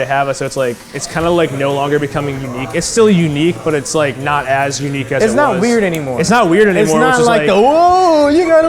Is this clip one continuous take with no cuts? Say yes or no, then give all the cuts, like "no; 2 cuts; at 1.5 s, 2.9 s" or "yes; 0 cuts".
yes; 0 cuts